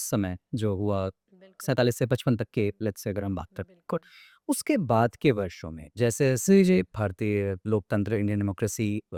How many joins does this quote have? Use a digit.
0